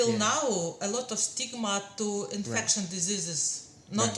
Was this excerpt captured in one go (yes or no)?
yes